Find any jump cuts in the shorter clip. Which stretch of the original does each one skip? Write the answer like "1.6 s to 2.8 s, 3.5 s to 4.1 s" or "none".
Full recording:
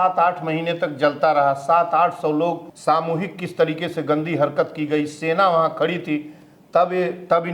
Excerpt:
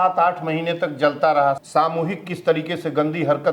1.6 s to 2.7 s